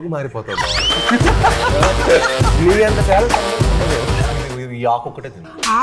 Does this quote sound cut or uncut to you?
cut